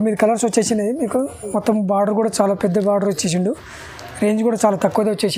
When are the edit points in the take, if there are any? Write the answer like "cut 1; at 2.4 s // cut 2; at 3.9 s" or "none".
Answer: none